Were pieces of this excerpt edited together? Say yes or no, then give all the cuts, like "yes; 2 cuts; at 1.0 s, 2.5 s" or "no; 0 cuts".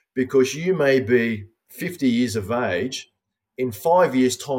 no; 0 cuts